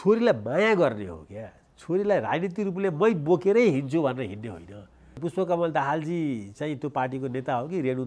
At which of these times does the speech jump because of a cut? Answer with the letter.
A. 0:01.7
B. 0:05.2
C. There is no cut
B